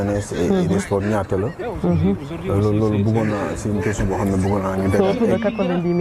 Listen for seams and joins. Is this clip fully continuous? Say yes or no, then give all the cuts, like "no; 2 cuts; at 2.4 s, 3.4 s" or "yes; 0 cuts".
yes; 0 cuts